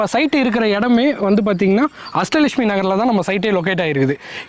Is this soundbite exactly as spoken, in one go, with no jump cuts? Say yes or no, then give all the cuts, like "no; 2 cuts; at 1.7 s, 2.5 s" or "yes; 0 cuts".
yes; 0 cuts